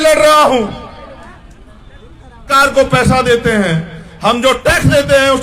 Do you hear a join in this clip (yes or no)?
yes